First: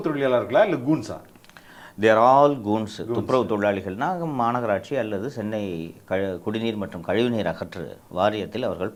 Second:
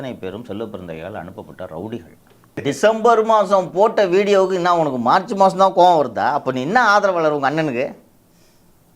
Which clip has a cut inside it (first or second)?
second